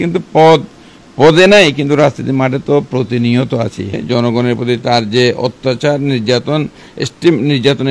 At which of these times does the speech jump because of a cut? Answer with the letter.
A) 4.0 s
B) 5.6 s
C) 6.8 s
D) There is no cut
A